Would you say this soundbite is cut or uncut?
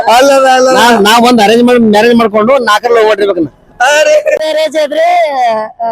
cut